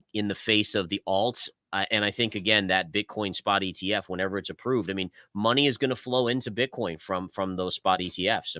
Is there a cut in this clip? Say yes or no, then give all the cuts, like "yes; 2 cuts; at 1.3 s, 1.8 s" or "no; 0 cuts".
no; 0 cuts